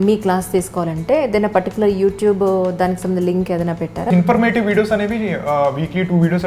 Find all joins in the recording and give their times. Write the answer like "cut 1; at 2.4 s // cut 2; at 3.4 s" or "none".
cut 1; at 4.1 s

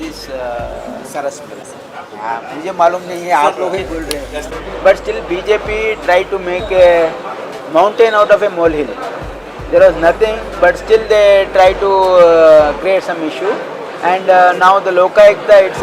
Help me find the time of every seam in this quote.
cut 1; at 1.7 s // cut 2; at 4.5 s

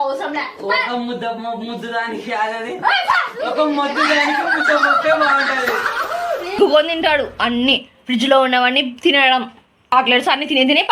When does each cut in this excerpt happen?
cut 1; at 6.6 s // cut 2; at 9.9 s

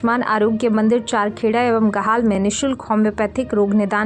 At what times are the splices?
none

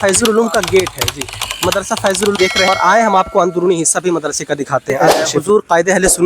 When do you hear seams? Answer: cut 1; at 5.4 s

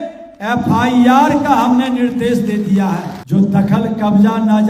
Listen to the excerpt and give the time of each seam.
cut 1; at 3.1 s

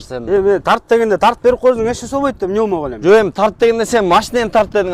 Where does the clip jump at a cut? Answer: none

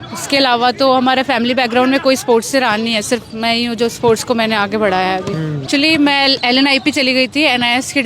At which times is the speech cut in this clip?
cut 1; at 5.6 s

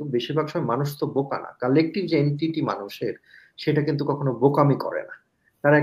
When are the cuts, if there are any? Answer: none

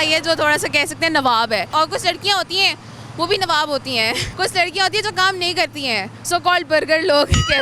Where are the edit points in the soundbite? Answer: cut 1; at 1.7 s // cut 2; at 4.3 s

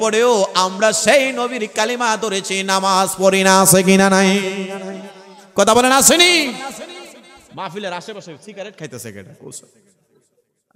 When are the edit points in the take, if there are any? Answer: none

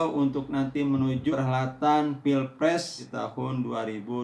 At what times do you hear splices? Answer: cut 1; at 1.3 s // cut 2; at 3.0 s

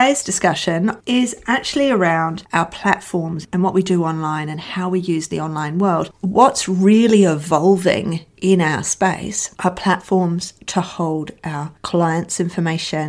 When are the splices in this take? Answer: cut 1; at 1.0 s // cut 2; at 3.4 s // cut 3; at 6.1 s

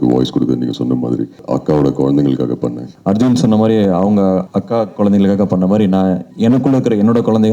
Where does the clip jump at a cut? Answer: cut 1; at 1.4 s // cut 2; at 2.9 s // cut 3; at 4.5 s // cut 4; at 6.3 s

